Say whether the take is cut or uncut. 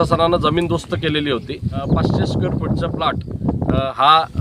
cut